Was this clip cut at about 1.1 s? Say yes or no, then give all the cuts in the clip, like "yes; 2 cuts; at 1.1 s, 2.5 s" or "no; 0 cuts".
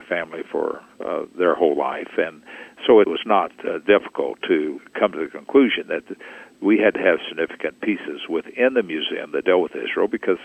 no; 2 cuts; at 3.2 s, 4.8 s